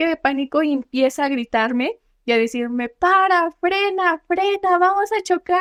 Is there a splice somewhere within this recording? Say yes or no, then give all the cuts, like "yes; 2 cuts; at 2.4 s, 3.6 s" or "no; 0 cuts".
no; 0 cuts